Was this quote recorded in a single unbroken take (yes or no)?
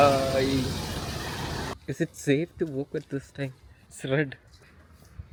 yes